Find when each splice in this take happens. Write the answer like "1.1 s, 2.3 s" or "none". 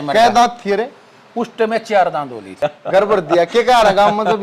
2.5 s